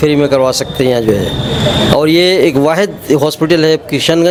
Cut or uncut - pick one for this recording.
uncut